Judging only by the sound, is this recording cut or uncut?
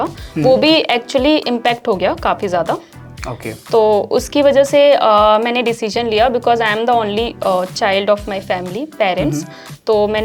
uncut